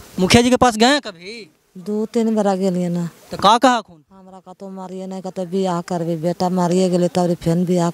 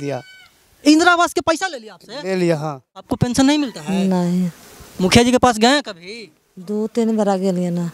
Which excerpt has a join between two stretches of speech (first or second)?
second